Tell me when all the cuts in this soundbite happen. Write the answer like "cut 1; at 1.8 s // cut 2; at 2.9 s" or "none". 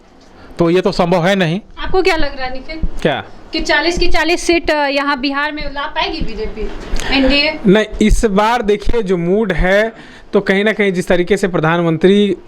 none